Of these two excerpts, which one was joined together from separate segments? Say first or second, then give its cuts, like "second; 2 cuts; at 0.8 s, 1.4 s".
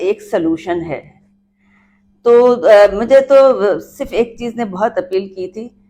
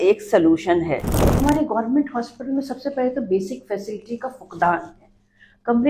second; 1 cut; at 1.2 s